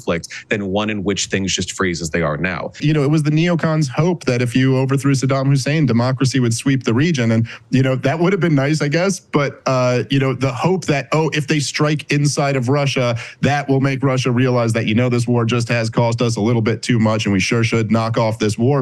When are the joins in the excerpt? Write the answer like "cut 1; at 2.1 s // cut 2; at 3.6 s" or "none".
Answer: cut 1; at 2.8 s